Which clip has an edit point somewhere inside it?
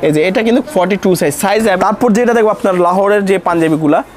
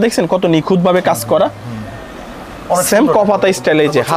first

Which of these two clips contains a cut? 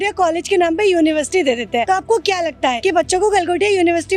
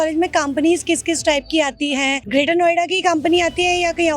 second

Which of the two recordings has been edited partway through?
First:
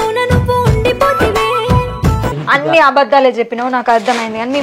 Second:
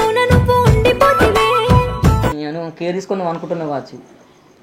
first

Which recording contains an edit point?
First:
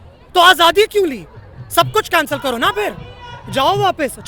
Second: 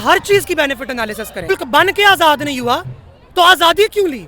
second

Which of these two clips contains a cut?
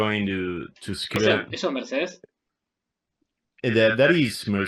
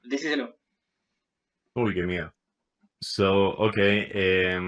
first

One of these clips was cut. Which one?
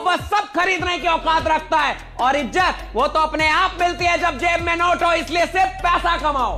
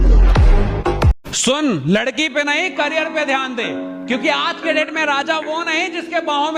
second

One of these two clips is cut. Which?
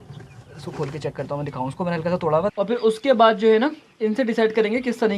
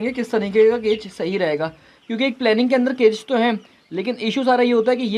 first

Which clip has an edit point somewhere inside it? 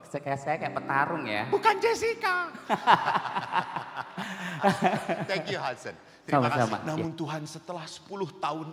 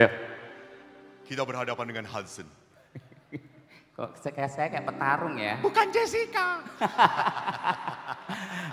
first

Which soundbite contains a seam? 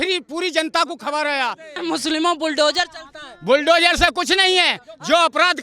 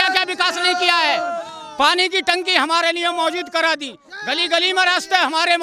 first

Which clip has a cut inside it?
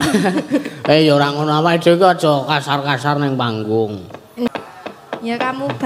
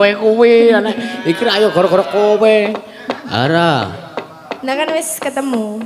first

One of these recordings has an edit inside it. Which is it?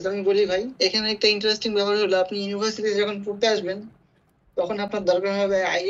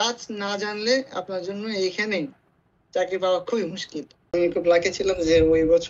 second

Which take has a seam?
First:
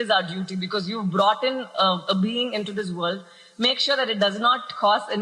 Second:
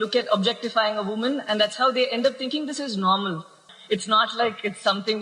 second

